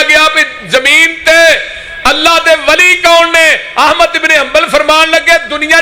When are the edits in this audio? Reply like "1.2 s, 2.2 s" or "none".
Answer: none